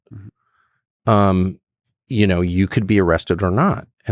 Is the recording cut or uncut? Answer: uncut